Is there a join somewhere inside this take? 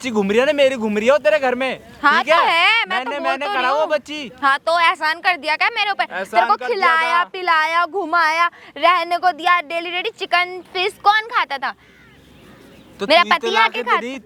no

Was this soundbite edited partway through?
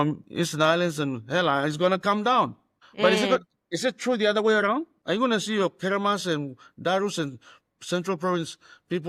no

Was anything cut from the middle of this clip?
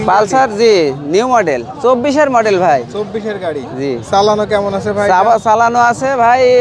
no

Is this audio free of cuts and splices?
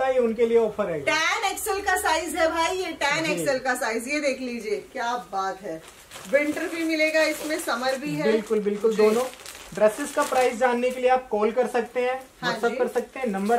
yes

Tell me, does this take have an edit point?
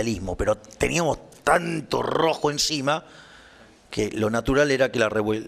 no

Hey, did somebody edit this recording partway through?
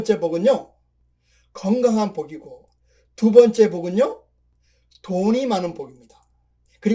no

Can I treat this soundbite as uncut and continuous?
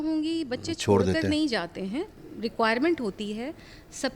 no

